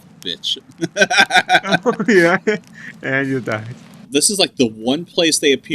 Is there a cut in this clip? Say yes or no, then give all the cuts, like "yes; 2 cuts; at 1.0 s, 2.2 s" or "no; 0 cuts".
yes; 1 cut; at 4.1 s